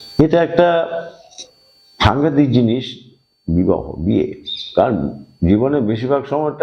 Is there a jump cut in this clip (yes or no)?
no